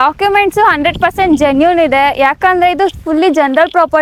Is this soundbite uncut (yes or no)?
yes